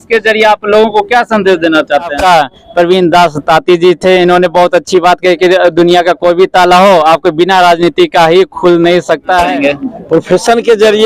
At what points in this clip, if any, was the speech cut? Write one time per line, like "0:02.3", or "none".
0:02.2
0:09.5

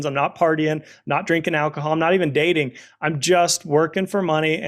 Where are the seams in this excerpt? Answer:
none

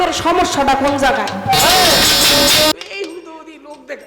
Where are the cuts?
0:02.7

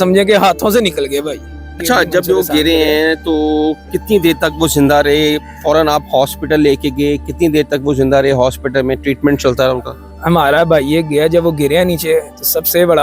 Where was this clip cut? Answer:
0:01.7

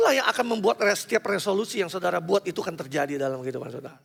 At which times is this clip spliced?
none

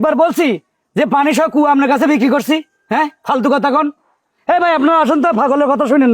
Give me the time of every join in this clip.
none

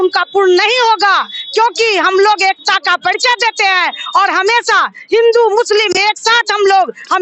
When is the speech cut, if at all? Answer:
none

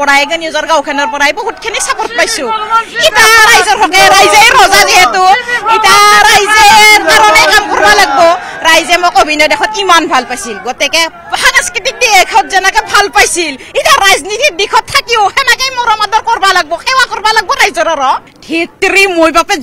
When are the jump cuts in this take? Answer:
0:18.3

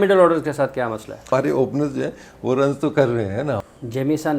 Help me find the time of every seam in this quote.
0:01.2
0:03.6

